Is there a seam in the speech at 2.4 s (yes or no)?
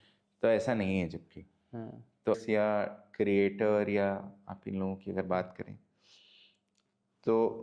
yes